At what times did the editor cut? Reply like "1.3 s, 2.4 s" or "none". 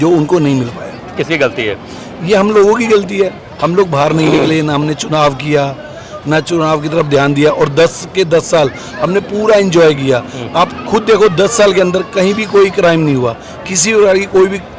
none